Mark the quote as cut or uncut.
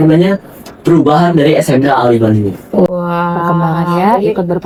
uncut